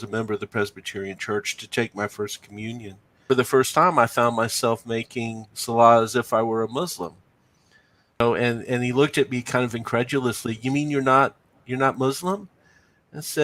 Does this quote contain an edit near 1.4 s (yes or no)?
no